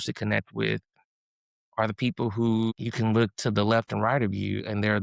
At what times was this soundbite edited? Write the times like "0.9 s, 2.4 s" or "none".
2.8 s